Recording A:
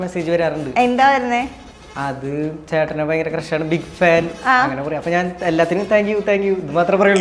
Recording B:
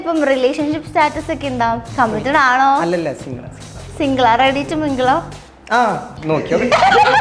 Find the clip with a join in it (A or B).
B